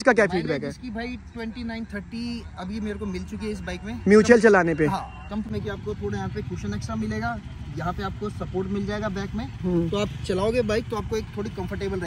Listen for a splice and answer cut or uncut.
cut